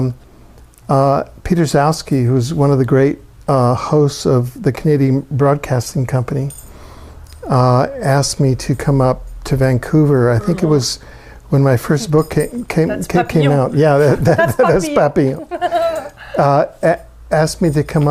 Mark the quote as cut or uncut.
cut